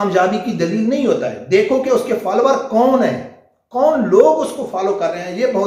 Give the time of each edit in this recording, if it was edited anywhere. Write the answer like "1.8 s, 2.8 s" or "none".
none